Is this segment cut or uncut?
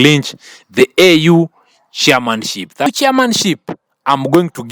cut